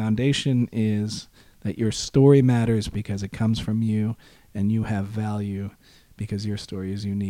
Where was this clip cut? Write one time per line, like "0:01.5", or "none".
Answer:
none